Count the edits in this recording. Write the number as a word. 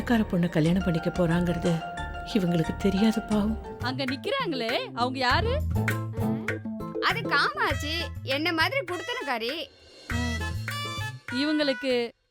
one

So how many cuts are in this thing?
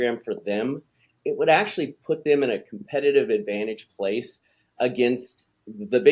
zero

